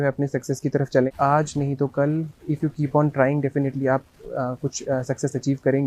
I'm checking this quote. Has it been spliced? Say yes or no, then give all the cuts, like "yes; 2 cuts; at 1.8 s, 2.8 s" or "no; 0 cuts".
yes; 1 cut; at 1.1 s